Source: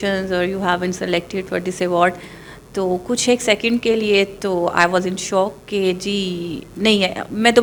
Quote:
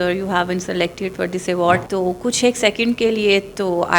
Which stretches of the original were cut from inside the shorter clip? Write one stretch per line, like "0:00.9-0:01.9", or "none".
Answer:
0:02.2-0:02.7